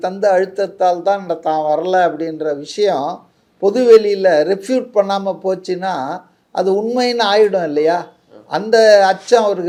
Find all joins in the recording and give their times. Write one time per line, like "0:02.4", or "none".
none

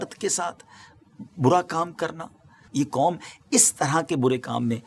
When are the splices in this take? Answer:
0:02.6

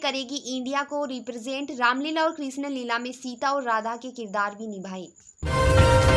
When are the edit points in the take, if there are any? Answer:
0:05.1

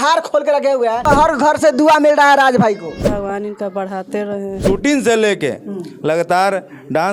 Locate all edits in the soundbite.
0:01.1
0:03.0
0:04.6

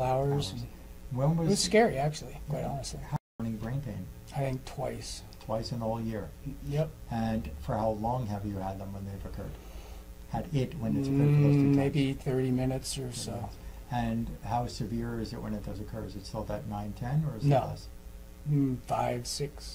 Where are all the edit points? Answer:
0:03.2

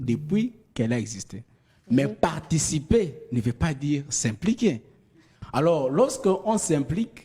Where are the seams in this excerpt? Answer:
none

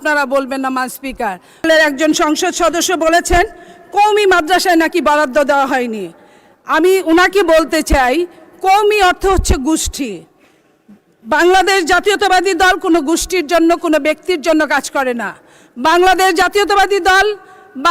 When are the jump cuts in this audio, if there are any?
0:01.6

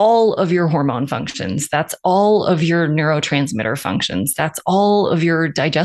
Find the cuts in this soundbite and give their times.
none

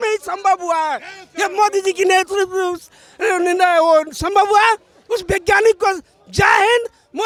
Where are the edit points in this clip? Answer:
none

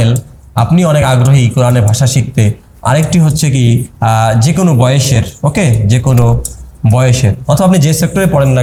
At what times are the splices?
none

